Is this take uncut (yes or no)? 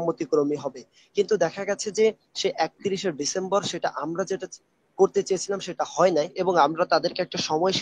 no